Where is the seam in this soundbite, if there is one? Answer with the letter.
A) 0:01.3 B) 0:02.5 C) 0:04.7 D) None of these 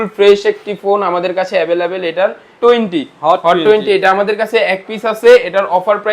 B